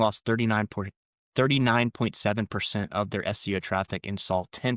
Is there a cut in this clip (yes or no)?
no